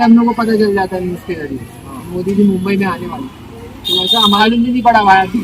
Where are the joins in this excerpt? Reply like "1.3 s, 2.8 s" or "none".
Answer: 4.4 s